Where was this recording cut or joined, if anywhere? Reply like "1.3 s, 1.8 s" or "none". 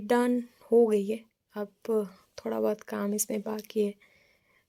none